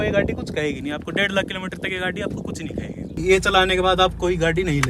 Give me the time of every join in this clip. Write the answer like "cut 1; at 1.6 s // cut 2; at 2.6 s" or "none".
cut 1; at 3.2 s